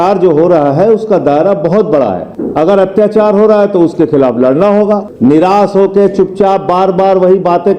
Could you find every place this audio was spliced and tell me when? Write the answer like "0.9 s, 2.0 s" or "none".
2.3 s, 5.1 s